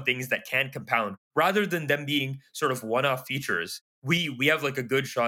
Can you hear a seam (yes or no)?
no